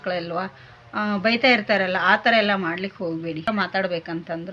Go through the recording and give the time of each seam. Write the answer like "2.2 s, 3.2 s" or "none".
3.5 s